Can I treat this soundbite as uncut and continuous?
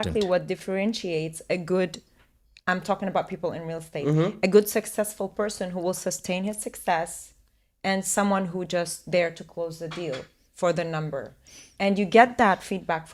yes; 0 cuts

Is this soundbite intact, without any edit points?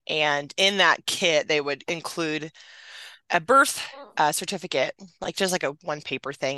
yes; 0 cuts

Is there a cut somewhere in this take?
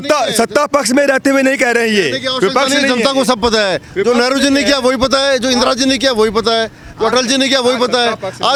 no; 0 cuts

